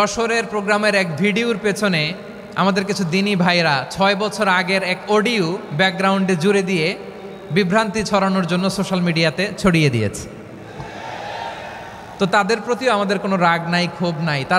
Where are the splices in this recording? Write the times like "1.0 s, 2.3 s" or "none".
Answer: none